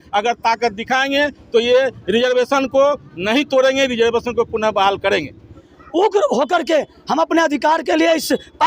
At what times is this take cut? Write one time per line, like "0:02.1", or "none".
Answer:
0:05.6